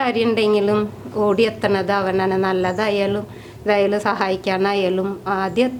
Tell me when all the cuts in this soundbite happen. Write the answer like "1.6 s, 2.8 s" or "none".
none

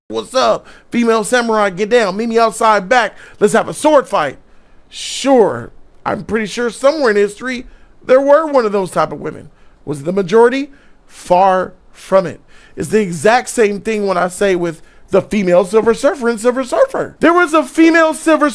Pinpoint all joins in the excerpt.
17.1 s

